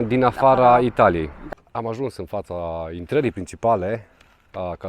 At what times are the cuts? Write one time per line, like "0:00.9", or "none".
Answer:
0:01.4